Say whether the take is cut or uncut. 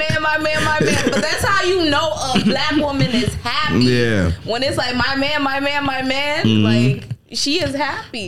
uncut